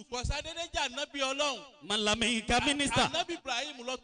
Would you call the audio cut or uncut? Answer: uncut